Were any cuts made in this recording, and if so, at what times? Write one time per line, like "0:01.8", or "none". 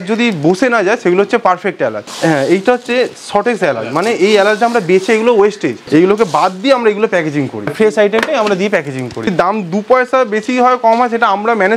0:02.1
0:05.7
0:07.7
0:09.3